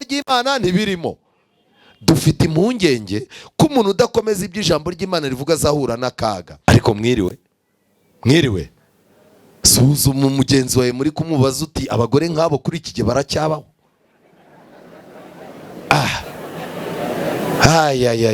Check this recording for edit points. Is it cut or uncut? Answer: cut